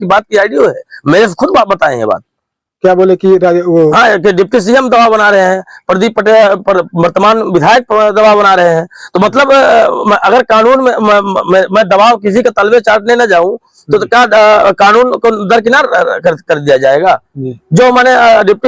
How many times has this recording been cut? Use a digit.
0